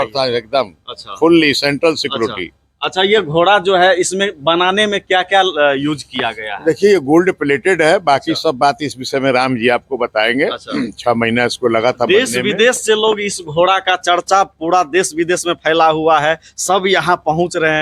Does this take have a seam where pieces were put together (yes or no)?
no